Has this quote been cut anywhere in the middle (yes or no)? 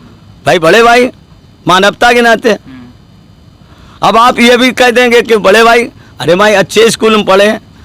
no